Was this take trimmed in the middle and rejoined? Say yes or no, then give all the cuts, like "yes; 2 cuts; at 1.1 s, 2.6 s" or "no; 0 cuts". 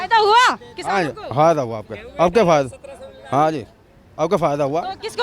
no; 0 cuts